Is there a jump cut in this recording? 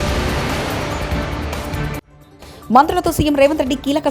yes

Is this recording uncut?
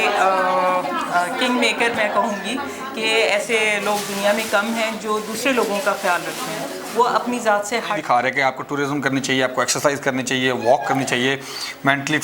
no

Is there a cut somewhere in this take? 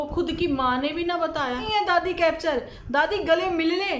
yes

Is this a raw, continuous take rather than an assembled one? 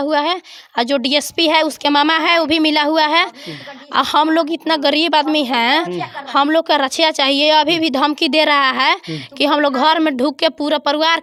yes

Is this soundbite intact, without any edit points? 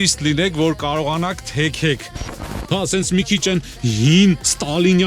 no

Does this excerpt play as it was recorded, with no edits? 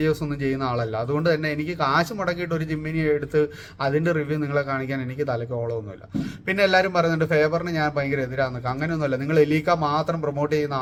yes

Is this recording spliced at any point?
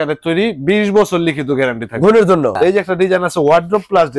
yes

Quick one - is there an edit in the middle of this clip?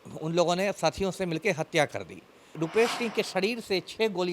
yes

